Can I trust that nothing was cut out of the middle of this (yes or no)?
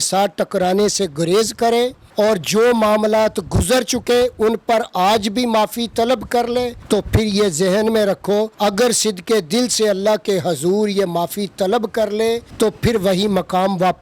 no